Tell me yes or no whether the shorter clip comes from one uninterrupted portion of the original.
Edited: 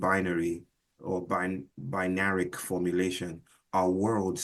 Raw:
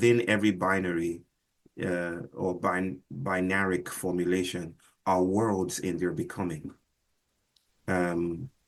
no